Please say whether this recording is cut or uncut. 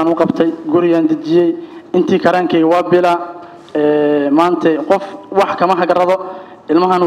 uncut